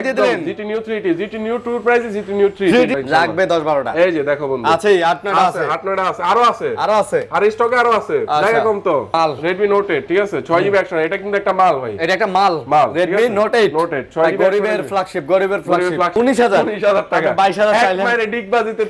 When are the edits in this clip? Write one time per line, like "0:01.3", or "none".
0:02.9
0:09.1
0:16.2